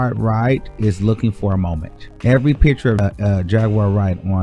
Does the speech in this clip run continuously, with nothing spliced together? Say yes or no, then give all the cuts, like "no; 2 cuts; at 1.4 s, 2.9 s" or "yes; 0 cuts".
no; 1 cut; at 3.0 s